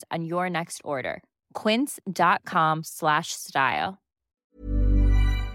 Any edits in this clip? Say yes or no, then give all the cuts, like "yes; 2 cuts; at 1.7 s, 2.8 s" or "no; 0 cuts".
yes; 1 cut; at 4.6 s